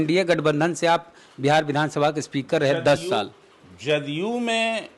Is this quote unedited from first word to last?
yes; 0 cuts

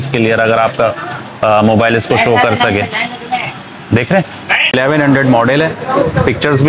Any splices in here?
yes; 1 cut; at 4.7 s

